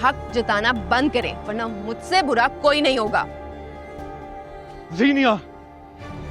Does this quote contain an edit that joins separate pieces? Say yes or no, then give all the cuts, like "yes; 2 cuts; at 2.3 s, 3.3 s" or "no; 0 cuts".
no; 0 cuts